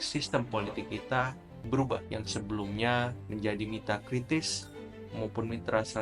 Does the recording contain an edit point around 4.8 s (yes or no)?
no